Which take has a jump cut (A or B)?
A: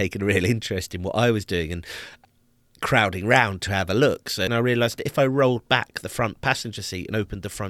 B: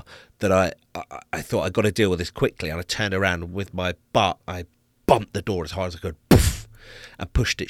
A